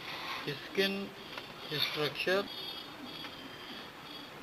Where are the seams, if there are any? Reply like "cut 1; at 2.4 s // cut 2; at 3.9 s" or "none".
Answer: cut 1; at 2.5 s